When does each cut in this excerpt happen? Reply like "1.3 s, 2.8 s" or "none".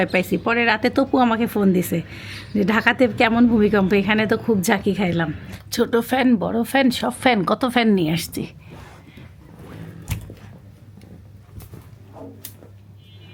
none